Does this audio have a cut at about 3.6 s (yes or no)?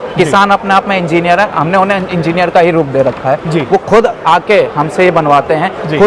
no